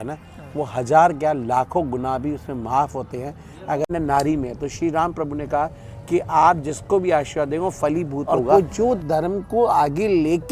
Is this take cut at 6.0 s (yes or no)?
no